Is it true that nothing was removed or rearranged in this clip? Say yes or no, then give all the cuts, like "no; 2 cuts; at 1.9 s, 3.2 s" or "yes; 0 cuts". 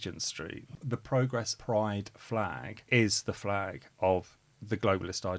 no; 2 cuts; at 1.1 s, 2.7 s